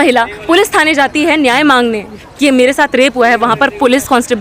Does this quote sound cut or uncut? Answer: uncut